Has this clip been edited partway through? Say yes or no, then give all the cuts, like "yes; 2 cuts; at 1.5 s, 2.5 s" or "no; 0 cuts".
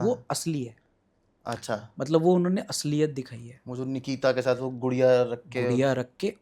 no; 0 cuts